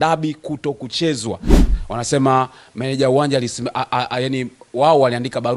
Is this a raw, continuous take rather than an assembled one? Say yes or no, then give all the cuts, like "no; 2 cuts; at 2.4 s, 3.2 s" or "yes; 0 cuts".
no; 1 cut; at 1.5 s